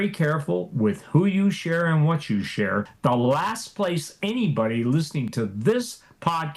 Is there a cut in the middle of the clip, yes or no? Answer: yes